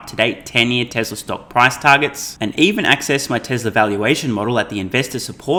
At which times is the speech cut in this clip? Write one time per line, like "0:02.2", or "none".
none